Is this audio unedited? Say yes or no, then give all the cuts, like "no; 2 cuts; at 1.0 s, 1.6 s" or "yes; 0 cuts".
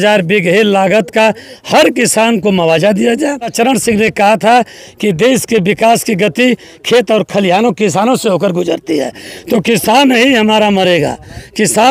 no; 1 cut; at 3.5 s